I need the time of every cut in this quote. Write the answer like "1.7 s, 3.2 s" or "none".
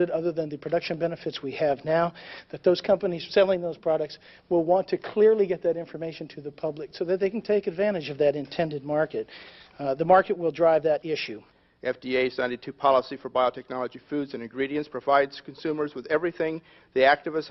14.1 s